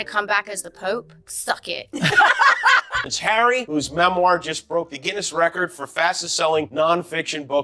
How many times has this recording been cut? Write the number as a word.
one